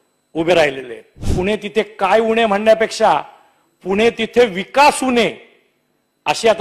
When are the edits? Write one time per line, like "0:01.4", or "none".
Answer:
0:01.3

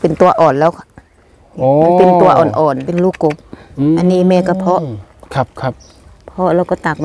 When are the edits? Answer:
0:02.9

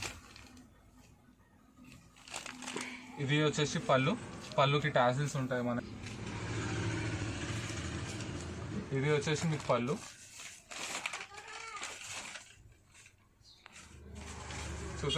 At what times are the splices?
0:05.8

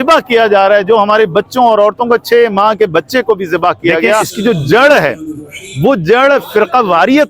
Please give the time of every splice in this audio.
0:04.3

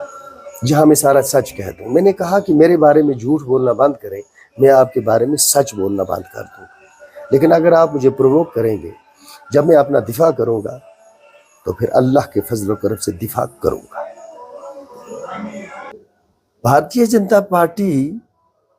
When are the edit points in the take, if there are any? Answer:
0:15.9

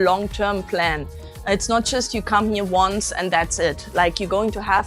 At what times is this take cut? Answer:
none

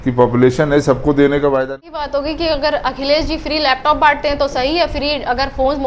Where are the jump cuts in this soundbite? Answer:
0:01.8

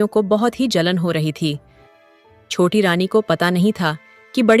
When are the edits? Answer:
0:01.8

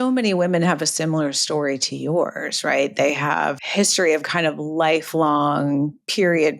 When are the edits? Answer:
0:03.6

